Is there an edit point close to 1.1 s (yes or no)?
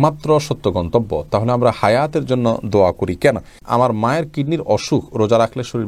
no